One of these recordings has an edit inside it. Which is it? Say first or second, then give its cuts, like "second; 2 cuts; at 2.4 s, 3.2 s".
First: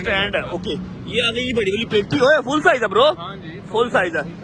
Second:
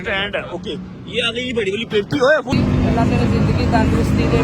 second; 1 cut; at 2.5 s